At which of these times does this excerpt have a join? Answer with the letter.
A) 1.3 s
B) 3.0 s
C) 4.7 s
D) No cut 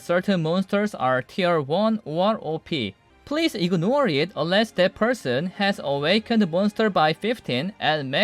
B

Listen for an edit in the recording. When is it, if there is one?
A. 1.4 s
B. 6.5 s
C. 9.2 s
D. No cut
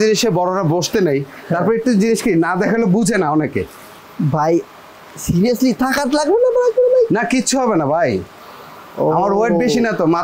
D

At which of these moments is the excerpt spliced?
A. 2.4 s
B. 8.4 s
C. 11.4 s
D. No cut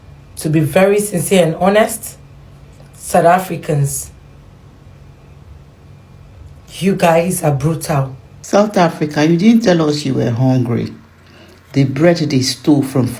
B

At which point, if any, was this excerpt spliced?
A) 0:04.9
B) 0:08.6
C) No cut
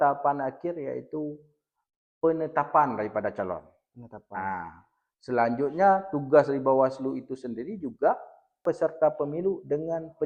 B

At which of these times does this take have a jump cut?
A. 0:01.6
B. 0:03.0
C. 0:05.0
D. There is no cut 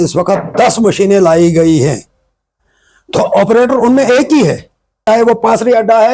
C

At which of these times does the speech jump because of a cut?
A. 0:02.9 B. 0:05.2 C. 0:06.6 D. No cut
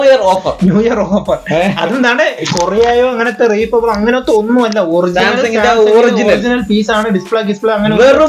D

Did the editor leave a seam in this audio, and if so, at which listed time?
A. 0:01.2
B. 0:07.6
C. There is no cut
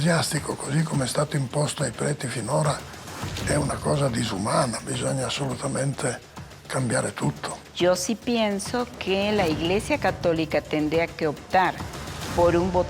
B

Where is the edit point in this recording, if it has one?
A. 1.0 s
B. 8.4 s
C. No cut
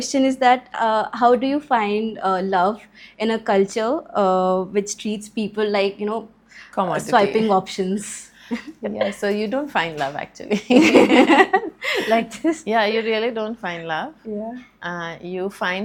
C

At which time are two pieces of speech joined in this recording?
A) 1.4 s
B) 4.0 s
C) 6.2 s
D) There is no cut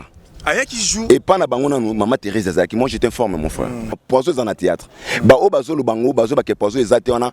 B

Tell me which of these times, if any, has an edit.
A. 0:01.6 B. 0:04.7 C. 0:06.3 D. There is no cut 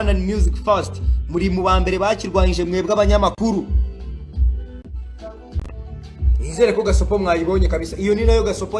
B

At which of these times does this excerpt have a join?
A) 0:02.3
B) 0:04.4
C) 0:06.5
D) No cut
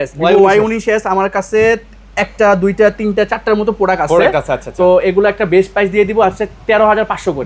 D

